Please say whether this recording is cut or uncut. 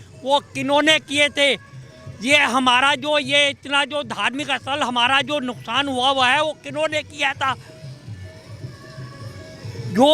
uncut